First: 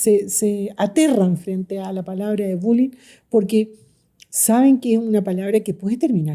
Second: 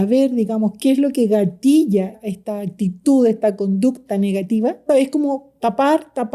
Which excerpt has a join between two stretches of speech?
second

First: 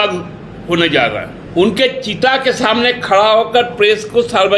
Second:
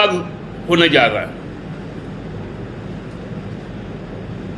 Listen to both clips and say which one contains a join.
first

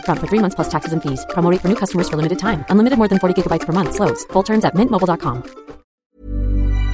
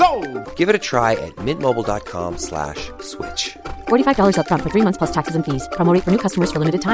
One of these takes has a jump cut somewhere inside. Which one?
first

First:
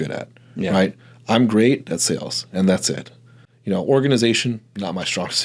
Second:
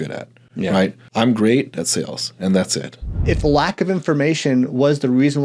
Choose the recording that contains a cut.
second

